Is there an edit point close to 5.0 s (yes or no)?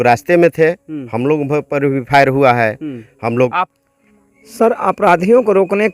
no